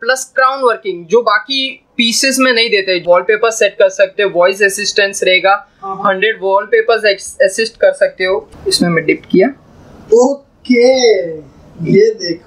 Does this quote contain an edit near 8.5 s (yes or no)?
yes